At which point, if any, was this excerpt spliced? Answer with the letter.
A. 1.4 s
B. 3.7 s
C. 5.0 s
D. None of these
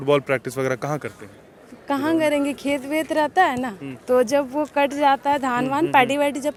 D